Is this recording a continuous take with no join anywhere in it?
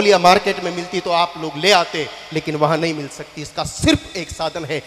yes; 0 cuts

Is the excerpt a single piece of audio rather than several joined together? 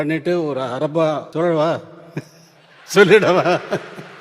no; 1 cut; at 1.3 s

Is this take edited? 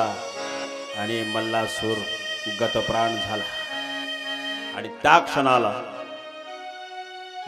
yes; 1 cut; at 4.6 s

